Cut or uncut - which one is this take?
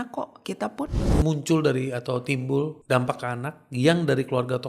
cut